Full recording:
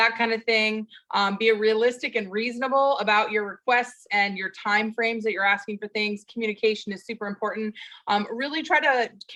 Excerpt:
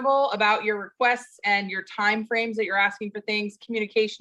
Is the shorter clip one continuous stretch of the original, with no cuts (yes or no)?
yes